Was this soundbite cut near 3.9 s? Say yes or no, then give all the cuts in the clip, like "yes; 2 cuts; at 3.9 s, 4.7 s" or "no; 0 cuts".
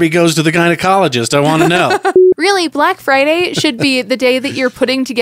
no; 1 cut; at 2.2 s